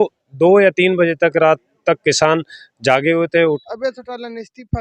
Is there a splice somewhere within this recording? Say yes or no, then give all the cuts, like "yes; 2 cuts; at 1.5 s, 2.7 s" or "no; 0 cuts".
yes; 1 cut; at 3.6 s